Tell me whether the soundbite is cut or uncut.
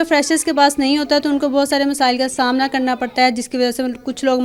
uncut